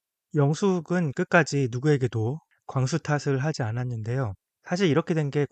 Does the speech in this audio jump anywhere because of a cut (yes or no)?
yes